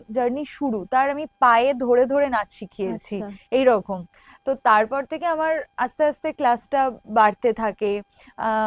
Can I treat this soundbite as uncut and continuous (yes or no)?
yes